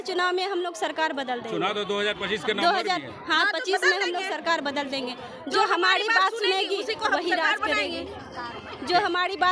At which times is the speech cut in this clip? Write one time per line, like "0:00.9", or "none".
none